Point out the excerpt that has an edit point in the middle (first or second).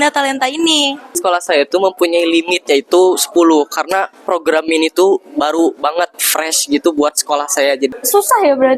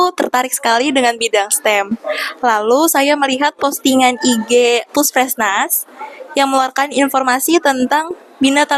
first